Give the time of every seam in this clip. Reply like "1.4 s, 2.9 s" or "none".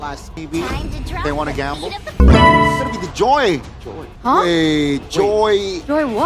none